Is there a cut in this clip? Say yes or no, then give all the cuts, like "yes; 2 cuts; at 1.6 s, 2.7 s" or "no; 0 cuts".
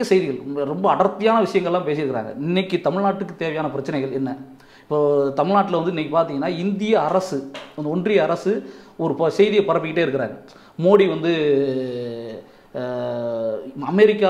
no; 0 cuts